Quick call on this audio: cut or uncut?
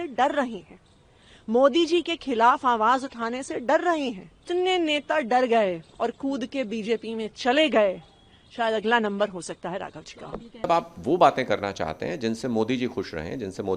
cut